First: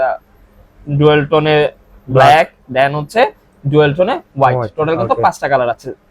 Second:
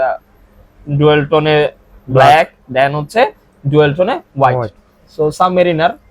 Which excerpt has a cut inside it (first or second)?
second